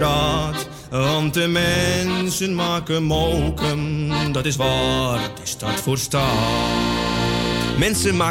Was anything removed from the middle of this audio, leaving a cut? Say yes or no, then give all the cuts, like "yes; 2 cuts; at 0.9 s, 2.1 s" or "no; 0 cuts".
no; 0 cuts